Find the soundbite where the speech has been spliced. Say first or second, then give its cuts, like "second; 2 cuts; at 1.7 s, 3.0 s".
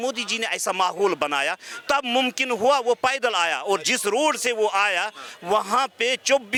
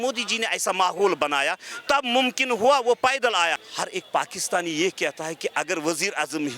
second; 1 cut; at 3.6 s